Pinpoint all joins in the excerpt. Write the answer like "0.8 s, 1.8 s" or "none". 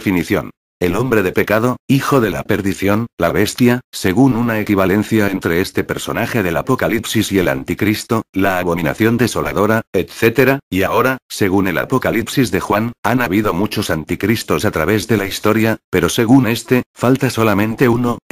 9.5 s